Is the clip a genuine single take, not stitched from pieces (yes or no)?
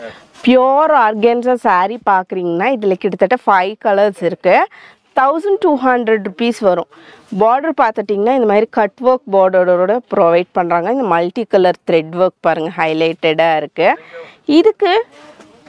yes